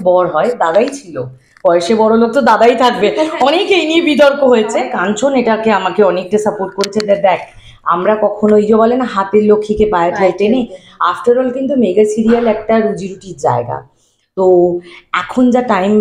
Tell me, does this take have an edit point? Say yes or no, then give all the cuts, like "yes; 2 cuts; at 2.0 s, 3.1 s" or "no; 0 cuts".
yes; 1 cut; at 4.9 s